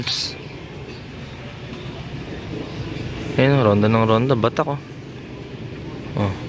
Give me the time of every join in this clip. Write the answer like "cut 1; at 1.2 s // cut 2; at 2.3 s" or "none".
none